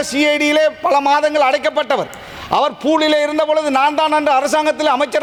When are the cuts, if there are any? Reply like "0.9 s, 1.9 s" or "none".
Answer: none